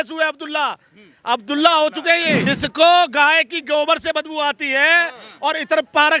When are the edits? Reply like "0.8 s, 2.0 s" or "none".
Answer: 2.5 s

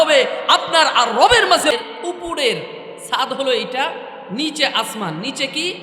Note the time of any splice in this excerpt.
1.7 s

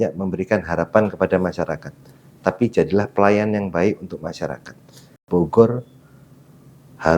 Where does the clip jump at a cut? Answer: 5.2 s

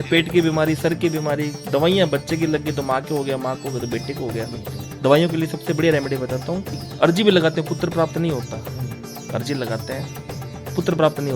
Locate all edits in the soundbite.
6.8 s

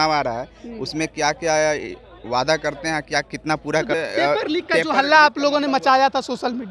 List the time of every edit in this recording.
4.0 s

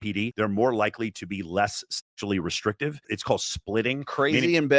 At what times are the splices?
none

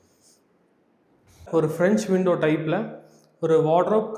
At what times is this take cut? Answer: 1.4 s

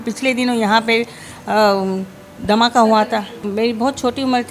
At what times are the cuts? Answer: 3.5 s

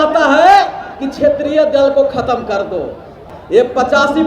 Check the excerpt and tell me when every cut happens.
3.3 s

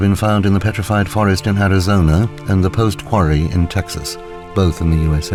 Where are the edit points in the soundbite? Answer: none

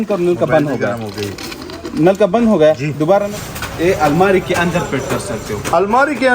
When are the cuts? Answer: 3.3 s

